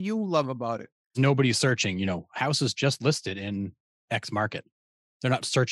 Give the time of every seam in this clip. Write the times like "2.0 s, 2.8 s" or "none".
1.1 s